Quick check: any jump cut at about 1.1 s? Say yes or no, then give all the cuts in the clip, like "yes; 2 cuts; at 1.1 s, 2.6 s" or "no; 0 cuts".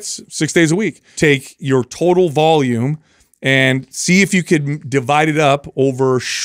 yes; 1 cut; at 1.1 s